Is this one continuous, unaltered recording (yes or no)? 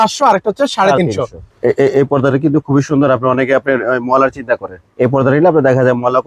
no